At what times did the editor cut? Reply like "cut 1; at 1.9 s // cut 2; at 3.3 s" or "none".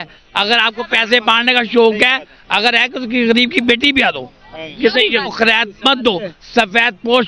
cut 1; at 5.3 s